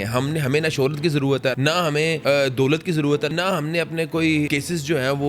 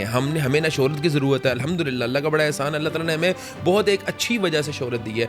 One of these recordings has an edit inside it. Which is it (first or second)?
first